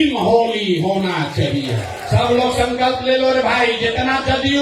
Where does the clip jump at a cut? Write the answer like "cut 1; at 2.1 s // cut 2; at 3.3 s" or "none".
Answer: cut 1; at 1.9 s